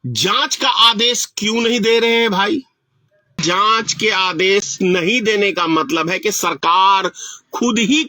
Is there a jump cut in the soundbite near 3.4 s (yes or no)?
yes